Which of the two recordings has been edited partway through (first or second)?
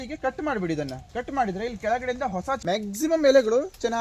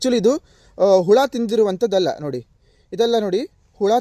first